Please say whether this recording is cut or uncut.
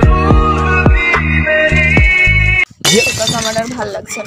cut